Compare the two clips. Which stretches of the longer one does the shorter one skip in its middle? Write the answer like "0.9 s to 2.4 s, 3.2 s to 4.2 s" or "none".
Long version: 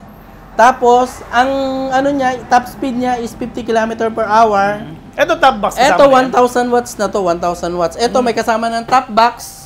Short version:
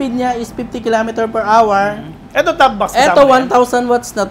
none